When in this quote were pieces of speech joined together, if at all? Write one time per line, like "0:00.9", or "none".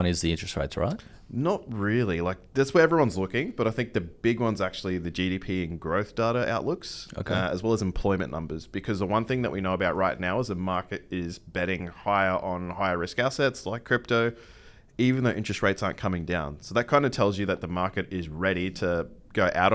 none